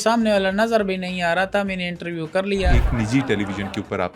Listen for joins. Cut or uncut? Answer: cut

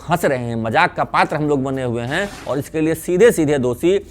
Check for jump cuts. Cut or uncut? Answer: cut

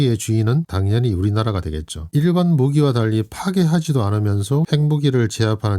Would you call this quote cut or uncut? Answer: cut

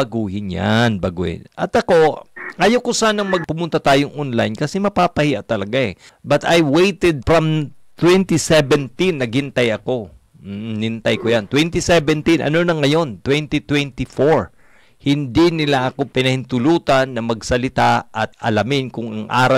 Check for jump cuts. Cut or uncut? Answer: cut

